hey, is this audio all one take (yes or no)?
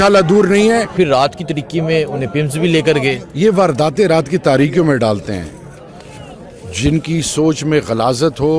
no